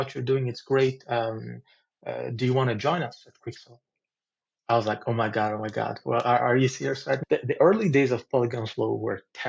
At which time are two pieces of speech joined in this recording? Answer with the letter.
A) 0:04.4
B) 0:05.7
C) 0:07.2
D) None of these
C